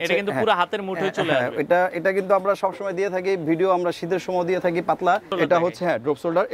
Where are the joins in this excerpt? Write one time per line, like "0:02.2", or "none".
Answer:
0:05.3